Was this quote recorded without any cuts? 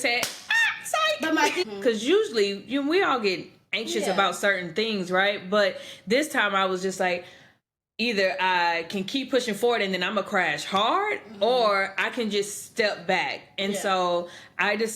no; 1 cut; at 1.6 s

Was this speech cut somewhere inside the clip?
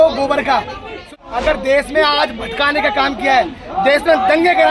yes; 1 cut; at 1.1 s

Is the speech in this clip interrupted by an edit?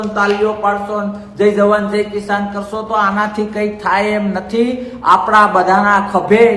no; 0 cuts

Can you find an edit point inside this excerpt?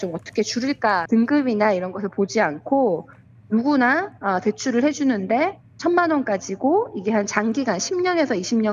yes; 1 cut; at 1.0 s

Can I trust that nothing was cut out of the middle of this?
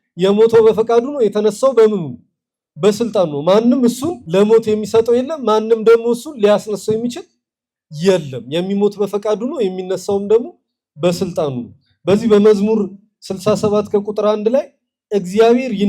no; 1 cut; at 4.1 s

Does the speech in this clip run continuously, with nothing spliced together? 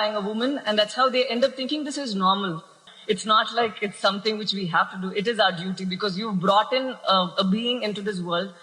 no; 1 cut; at 2.9 s

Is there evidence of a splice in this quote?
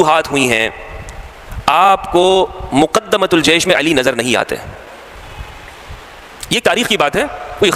no; 0 cuts

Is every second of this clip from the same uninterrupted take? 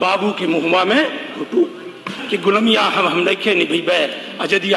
no; 1 cut; at 2.1 s

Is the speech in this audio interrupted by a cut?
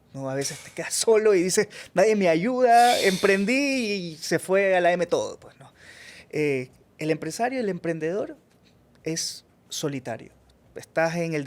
no; 0 cuts

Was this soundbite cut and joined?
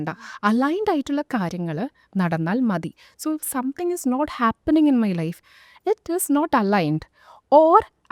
no; 0 cuts

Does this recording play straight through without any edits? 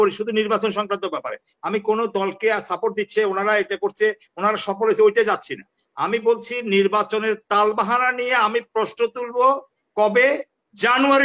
yes; 0 cuts

